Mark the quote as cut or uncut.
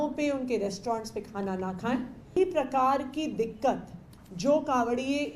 cut